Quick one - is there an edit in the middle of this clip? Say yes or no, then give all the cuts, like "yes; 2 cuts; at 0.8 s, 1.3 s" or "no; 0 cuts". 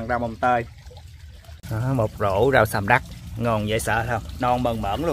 no; 0 cuts